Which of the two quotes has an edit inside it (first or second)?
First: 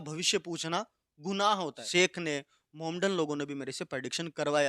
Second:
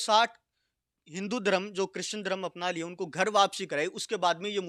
first